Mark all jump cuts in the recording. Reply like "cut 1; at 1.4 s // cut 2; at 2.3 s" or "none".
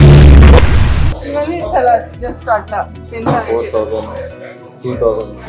cut 1; at 1.1 s